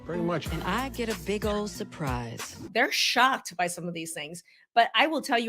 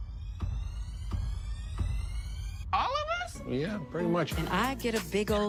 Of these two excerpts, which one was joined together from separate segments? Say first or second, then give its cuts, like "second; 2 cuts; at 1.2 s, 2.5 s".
first; 1 cut; at 2.7 s